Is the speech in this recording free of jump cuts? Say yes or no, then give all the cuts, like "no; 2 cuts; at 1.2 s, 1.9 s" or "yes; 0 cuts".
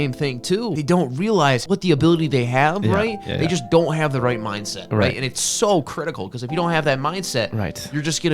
no; 2 cuts; at 0.7 s, 1.6 s